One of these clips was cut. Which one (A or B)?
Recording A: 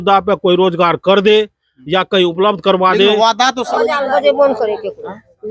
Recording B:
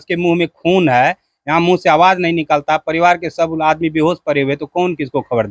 A